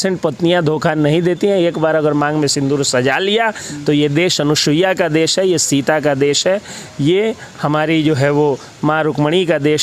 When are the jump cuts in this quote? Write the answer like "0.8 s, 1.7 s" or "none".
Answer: none

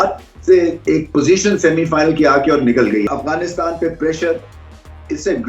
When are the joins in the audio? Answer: 3.1 s

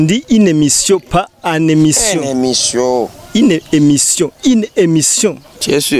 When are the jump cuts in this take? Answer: none

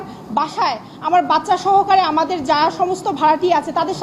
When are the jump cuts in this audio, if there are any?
none

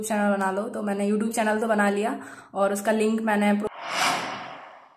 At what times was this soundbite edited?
3.7 s

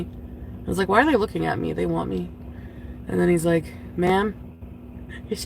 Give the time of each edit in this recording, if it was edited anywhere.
2.4 s

